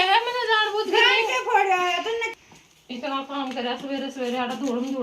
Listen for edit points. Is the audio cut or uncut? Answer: cut